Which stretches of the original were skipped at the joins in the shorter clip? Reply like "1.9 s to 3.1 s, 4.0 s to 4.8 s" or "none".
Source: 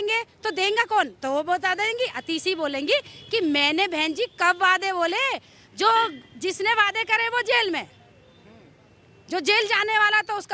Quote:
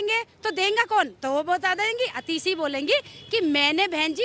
none